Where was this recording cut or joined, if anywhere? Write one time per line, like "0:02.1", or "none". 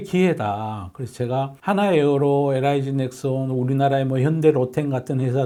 none